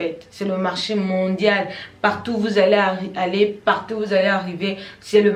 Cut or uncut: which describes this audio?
uncut